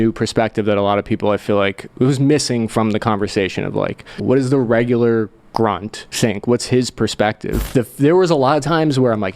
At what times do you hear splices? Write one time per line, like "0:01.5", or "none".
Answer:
0:04.2
0:06.0
0:07.5